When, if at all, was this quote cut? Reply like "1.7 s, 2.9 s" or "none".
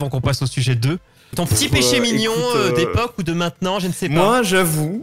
1.2 s